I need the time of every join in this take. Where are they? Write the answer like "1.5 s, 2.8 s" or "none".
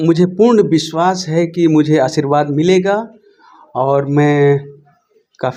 none